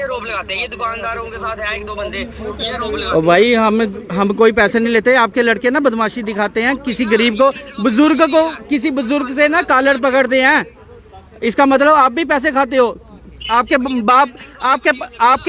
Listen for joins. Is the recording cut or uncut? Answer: uncut